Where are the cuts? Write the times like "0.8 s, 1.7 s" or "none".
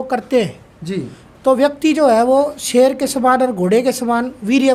none